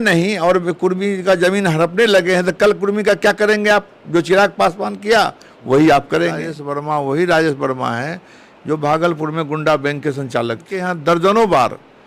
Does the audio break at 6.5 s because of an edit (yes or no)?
yes